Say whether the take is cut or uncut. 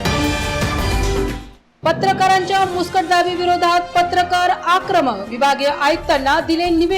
uncut